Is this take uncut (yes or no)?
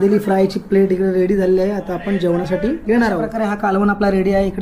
no